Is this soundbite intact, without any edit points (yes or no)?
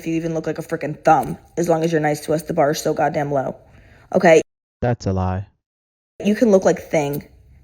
yes